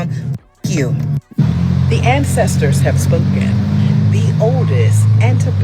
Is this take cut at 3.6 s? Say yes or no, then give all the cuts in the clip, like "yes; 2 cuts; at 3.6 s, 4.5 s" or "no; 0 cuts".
no; 1 cut; at 1.3 s